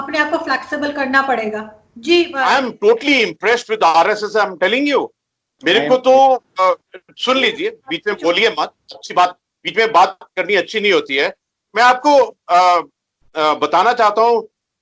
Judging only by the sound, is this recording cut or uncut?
cut